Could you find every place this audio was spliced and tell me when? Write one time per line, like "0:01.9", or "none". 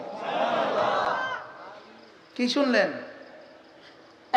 none

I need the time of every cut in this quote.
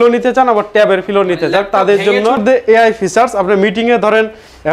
0:02.4

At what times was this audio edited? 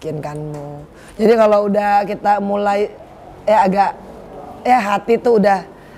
none

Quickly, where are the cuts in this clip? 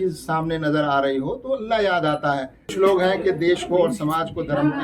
0:02.7

